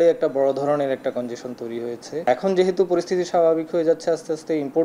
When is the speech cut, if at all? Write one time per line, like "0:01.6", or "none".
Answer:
0:02.3